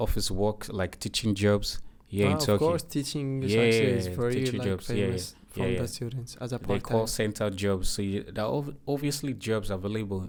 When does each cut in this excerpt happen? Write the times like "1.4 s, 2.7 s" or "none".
none